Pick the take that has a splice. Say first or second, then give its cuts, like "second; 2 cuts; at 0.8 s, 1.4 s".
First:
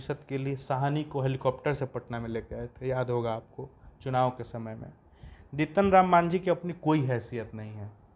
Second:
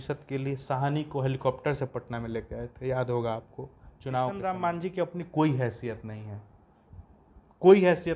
second; 1 cut; at 4.4 s